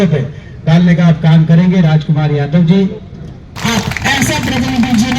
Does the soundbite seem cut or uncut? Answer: cut